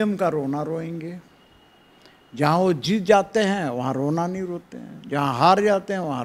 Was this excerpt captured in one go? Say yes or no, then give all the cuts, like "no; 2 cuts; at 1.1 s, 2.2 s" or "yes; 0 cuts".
yes; 0 cuts